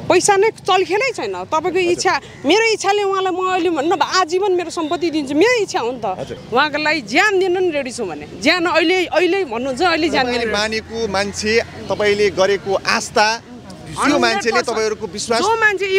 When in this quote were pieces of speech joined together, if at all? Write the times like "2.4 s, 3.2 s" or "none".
6.3 s